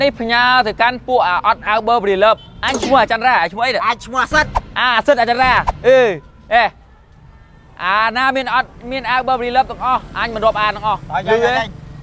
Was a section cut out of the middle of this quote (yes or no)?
no